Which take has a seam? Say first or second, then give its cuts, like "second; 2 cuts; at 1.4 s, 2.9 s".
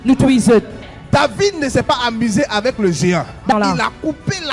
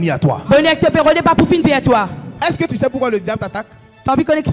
second; 1 cut; at 2.4 s